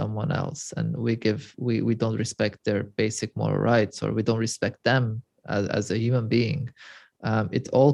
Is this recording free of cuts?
yes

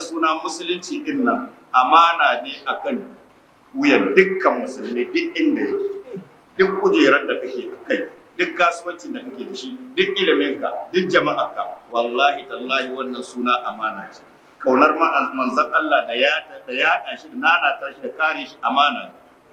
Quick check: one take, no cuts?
yes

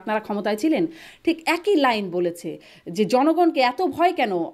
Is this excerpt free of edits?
yes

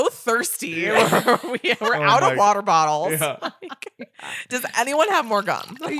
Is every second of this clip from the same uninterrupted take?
yes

